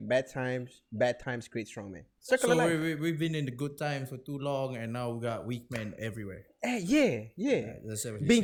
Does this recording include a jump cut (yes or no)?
no